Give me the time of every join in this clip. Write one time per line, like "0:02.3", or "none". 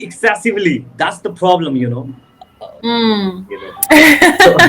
none